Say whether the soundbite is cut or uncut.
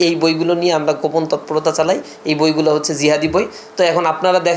uncut